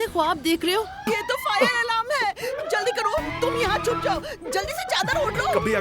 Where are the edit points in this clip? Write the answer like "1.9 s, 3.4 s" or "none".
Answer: 1.1 s